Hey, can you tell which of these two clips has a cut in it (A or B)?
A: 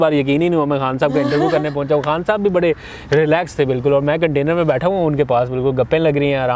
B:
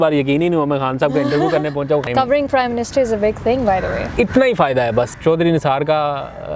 B